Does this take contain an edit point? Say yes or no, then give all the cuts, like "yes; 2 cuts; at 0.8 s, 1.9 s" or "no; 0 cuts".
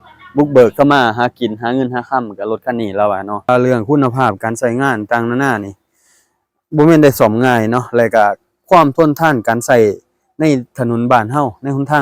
yes; 1 cut; at 3.5 s